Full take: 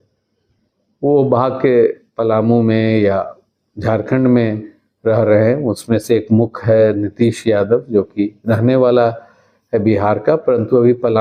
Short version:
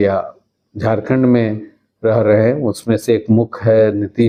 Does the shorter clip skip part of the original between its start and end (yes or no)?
no